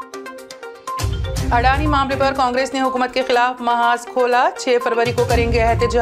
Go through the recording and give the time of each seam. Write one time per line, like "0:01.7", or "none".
none